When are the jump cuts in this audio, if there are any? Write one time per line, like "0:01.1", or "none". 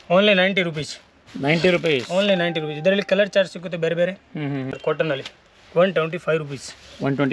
0:05.2